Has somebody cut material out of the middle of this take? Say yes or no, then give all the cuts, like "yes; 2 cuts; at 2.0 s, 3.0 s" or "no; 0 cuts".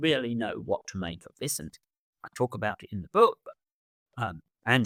no; 0 cuts